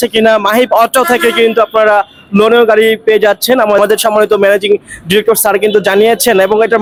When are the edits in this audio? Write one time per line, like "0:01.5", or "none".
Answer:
none